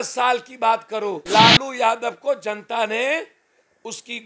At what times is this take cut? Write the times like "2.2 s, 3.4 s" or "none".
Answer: 1.2 s